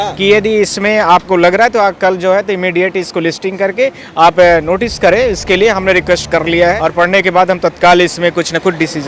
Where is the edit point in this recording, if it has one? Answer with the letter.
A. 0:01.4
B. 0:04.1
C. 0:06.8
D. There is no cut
C